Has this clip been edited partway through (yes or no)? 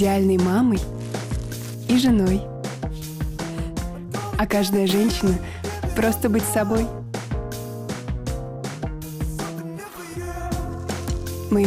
no